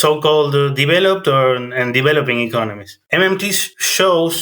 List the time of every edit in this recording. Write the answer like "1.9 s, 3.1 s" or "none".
3.0 s